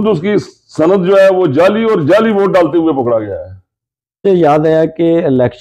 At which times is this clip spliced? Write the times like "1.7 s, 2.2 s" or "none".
4.2 s